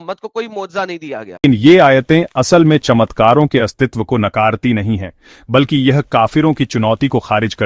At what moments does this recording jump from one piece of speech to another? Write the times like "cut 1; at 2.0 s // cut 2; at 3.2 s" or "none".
cut 1; at 1.4 s